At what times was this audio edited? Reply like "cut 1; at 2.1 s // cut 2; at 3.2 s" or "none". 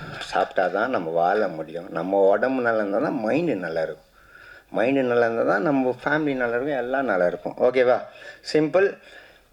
none